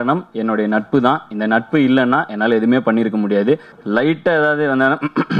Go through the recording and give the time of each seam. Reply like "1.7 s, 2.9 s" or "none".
3.7 s